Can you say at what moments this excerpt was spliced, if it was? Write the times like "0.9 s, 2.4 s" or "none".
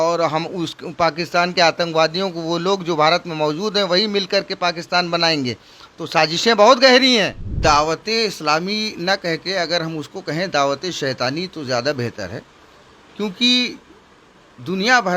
7.6 s